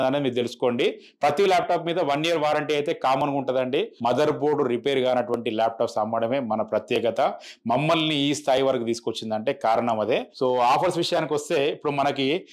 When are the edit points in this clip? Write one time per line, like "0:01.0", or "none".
0:03.9
0:10.3

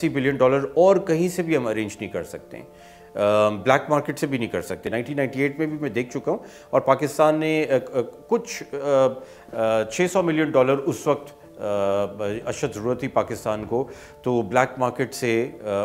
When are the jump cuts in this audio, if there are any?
0:04.9

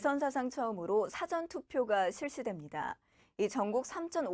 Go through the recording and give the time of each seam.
0:02.6

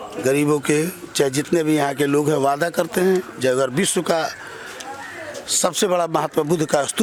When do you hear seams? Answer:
none

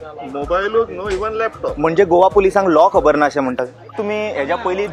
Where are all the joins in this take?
0:03.9

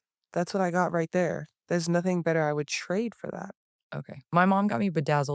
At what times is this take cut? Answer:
0:03.6

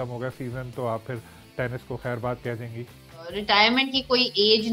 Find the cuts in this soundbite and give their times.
0:03.4

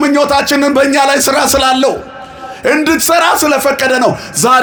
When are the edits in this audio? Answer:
none

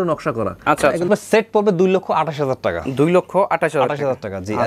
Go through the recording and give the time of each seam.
0:01.1

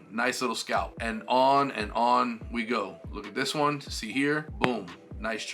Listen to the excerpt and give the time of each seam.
0:00.9
0:04.5

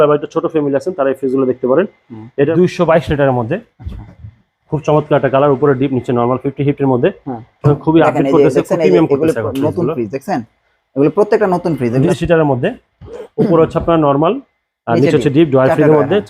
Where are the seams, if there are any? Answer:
0:02.5
0:12.1

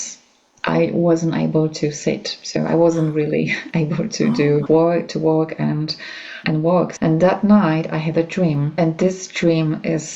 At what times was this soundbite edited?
0:04.6
0:06.4
0:08.7

